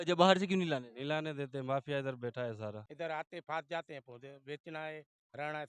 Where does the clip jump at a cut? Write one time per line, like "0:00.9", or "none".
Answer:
0:02.8